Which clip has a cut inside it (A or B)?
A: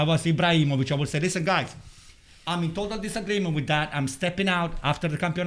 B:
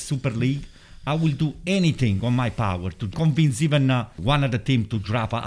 B